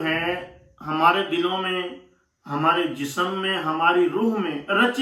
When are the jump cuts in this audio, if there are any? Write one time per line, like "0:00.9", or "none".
none